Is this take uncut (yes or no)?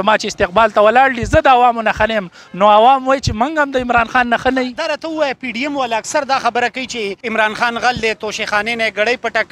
no